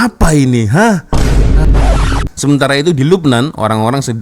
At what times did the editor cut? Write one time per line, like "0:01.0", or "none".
0:01.9